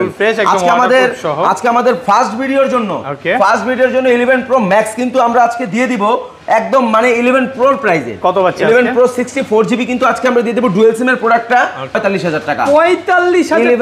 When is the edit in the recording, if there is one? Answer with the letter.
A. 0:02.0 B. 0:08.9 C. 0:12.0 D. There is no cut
C